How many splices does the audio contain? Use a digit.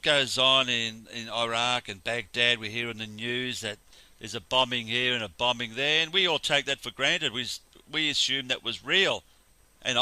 0